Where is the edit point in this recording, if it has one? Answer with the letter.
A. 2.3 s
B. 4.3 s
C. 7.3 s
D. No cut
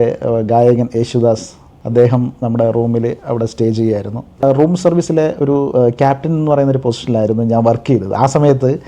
B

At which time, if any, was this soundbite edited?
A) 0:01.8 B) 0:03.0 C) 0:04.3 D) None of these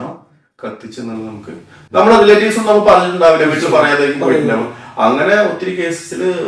A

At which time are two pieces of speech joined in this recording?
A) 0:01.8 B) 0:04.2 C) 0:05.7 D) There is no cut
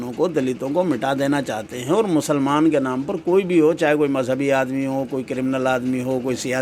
D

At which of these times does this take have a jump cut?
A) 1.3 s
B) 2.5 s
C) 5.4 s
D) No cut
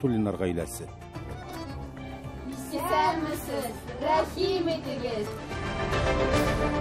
C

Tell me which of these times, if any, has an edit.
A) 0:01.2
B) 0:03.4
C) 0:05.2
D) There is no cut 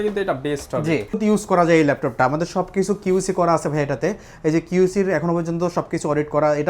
A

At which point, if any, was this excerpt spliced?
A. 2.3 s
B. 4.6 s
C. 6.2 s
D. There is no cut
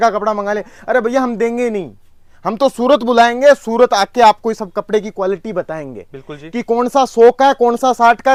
D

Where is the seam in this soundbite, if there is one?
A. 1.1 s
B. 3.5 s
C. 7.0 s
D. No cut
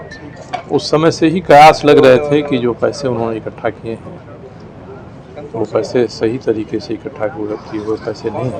D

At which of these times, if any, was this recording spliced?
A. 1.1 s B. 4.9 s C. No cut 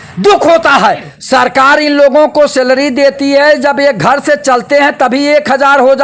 A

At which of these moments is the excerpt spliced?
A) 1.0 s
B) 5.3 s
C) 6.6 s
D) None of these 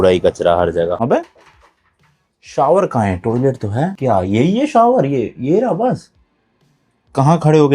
A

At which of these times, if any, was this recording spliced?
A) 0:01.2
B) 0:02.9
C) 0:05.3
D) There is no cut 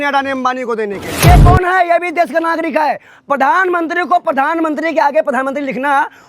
A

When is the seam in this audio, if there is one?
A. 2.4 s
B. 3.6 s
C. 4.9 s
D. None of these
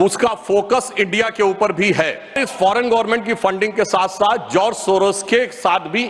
A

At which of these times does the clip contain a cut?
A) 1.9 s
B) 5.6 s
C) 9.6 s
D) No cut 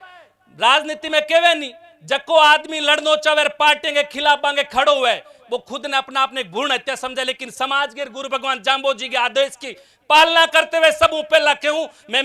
D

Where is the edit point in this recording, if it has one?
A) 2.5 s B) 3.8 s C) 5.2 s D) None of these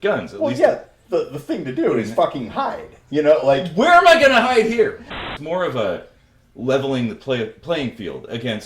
C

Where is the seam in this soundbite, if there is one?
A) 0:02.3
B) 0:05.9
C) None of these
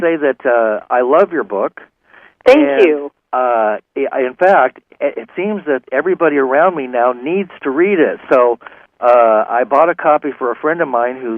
A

